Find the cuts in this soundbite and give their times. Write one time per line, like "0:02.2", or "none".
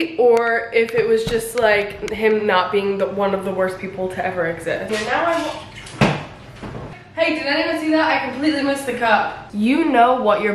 0:04.9
0:07.0
0:09.4